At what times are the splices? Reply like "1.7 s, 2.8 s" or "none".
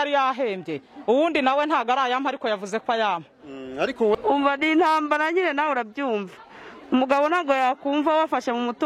4.1 s